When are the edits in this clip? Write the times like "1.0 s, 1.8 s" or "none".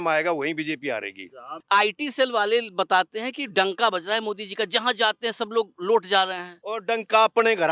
1.5 s

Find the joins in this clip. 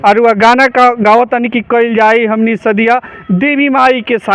none

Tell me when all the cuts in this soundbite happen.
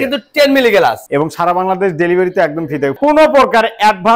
1.1 s, 2.9 s

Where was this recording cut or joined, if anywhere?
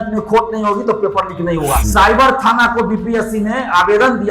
1.8 s

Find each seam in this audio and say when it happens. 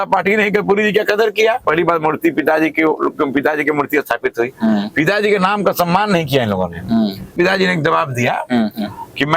1.6 s, 7.3 s

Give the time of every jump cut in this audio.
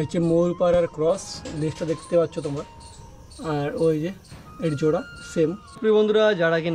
5.8 s

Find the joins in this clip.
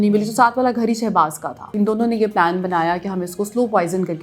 1.7 s

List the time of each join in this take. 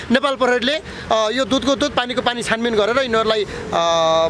none

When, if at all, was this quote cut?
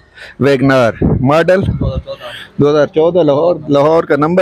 none

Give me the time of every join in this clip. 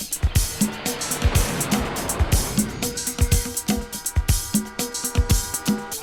none

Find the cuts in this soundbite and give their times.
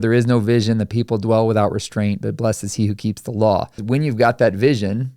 3.8 s

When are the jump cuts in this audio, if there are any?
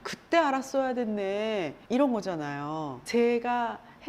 1.8 s, 3.0 s

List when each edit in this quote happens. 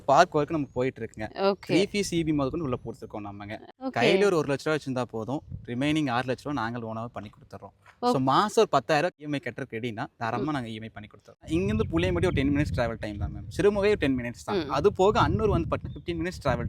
3.5 s, 9.2 s, 11.4 s

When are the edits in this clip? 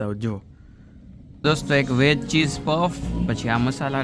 1.3 s

